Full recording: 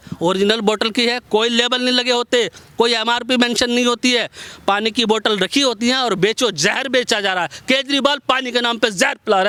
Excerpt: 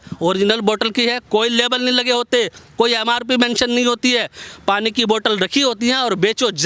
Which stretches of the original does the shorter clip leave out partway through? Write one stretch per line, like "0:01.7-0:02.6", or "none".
none